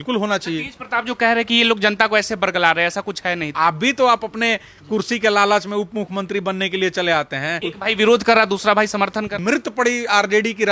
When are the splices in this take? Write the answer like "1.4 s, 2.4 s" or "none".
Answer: 3.5 s, 7.6 s, 9.4 s